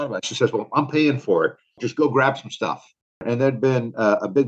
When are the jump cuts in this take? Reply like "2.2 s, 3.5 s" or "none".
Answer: 1.8 s, 3.2 s